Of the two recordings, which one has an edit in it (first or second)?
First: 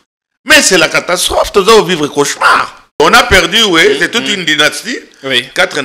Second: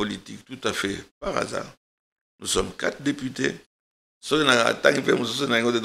first